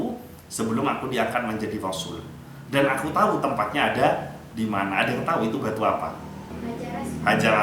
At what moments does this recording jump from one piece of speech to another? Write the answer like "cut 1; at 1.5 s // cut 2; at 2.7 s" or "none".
cut 1; at 6.5 s